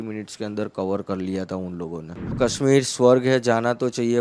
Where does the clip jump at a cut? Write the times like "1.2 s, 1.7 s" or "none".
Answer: 2.4 s